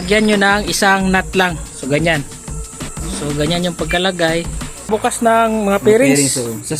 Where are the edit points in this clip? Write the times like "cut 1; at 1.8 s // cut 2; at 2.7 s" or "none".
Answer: cut 1; at 4.9 s

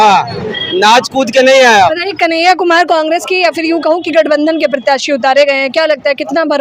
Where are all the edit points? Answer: cut 1; at 2.0 s

